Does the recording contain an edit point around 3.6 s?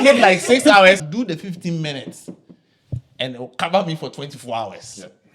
no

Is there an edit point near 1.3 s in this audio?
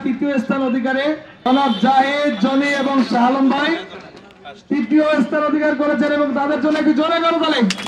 yes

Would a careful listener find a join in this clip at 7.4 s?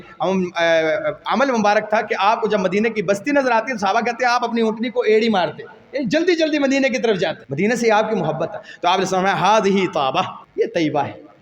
yes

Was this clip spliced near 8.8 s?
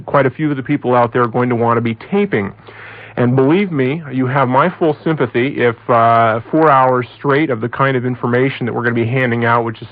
no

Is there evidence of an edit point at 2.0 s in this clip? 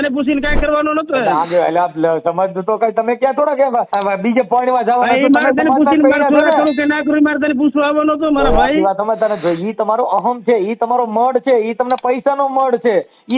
no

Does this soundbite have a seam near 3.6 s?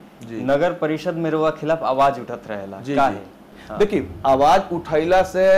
yes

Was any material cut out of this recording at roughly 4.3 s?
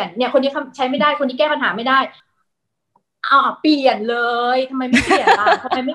no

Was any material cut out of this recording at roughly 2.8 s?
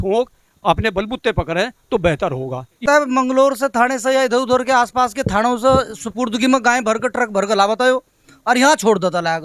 yes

